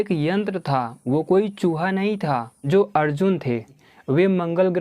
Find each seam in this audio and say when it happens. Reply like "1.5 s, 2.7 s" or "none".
2.6 s, 3.8 s

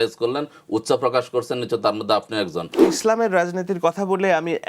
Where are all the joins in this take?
2.8 s

